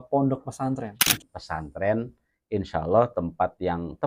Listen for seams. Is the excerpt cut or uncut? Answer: cut